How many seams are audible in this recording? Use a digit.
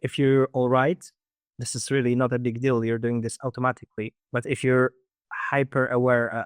1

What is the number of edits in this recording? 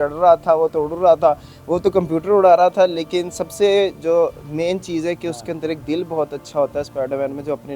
0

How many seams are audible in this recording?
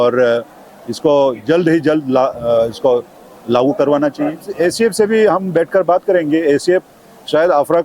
1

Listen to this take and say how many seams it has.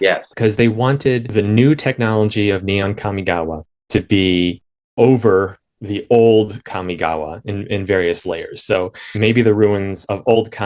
1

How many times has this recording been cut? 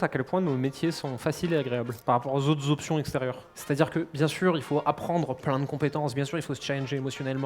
2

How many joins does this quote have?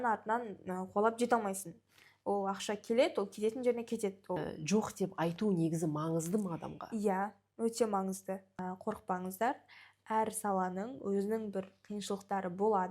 2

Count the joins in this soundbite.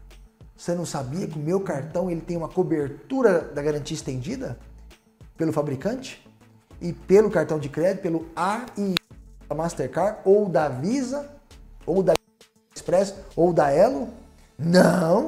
0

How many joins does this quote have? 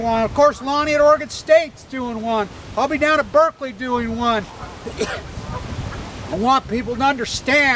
1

